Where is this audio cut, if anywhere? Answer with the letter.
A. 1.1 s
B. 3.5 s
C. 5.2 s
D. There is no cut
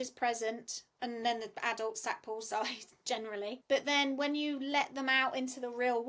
B